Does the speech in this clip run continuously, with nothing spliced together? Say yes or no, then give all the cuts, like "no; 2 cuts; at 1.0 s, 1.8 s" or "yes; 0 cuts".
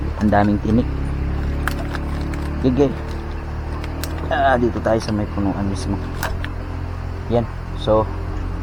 yes; 0 cuts